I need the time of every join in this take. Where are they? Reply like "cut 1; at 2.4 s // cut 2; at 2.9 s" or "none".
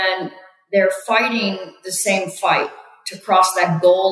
none